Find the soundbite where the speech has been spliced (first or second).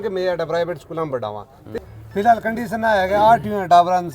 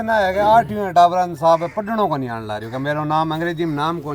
first